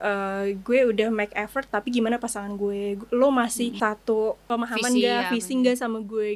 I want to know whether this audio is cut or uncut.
uncut